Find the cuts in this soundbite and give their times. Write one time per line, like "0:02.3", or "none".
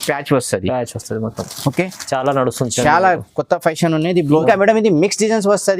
0:04.4